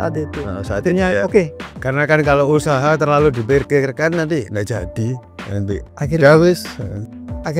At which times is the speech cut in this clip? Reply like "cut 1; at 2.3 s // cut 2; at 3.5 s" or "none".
cut 1; at 1.6 s